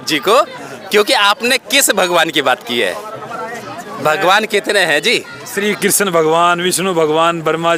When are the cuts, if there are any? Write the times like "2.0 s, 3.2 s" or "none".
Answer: none